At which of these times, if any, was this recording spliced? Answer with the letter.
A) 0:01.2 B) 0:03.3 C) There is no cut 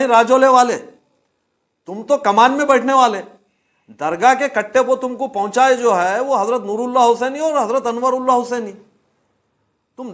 C